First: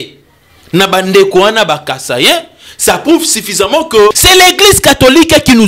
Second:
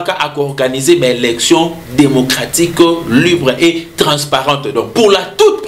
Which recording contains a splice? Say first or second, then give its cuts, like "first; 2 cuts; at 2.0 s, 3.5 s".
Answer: first; 1 cut; at 4.2 s